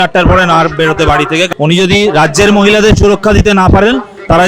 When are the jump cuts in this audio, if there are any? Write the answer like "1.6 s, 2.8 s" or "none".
1.5 s